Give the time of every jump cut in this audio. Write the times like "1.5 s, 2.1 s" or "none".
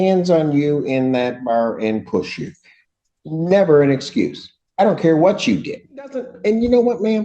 6.3 s